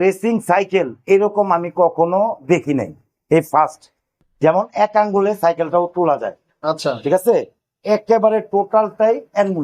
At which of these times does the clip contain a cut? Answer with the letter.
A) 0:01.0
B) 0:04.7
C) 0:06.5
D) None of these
D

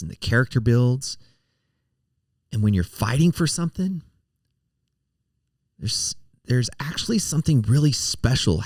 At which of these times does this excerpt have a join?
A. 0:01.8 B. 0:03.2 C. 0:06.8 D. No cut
D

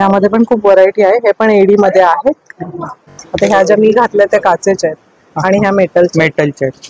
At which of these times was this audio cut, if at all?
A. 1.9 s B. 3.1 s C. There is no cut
B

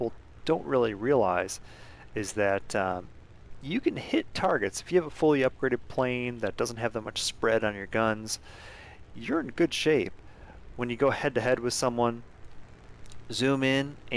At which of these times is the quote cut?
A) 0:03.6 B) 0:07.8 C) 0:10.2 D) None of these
A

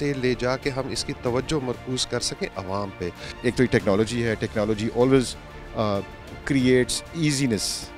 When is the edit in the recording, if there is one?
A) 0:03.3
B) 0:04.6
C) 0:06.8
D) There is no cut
A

